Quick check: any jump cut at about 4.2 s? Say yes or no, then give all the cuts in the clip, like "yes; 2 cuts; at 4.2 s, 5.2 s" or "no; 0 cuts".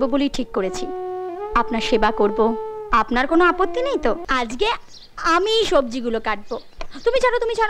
yes; 1 cut; at 4.2 s